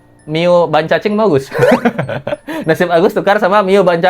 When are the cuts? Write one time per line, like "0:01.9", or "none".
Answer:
none

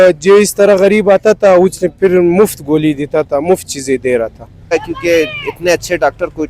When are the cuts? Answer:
0:04.7

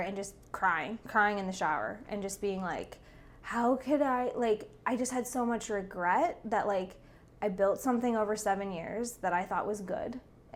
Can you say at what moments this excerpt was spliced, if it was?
none

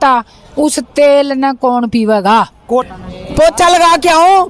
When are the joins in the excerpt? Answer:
0:02.9

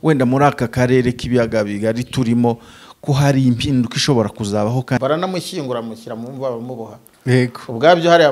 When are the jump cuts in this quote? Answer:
0:05.0

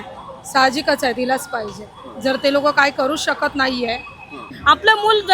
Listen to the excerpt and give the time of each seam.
0:04.4

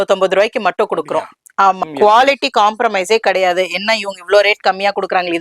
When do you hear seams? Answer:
0:01.9

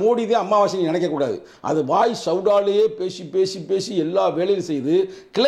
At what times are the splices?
0:01.5

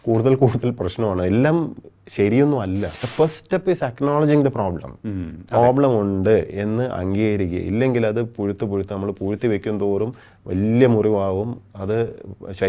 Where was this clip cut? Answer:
0:03.0

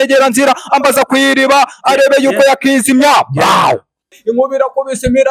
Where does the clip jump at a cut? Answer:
0:04.2

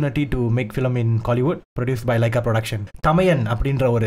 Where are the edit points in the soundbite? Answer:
0:01.7
0:02.8

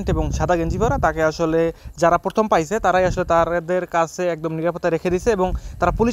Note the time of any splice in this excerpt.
none

